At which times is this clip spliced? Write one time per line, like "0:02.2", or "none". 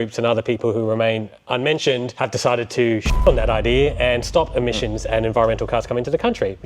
none